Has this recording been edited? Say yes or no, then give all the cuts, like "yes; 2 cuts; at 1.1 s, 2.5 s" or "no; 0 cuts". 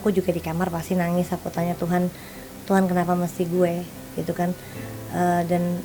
no; 0 cuts